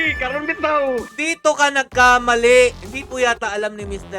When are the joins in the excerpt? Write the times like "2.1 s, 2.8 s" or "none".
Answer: 2.8 s